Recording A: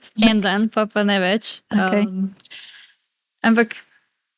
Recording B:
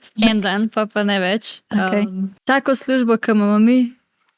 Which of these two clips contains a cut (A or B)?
B